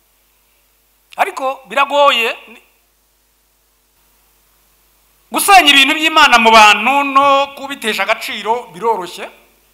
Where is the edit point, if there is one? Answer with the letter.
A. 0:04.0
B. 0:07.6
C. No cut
A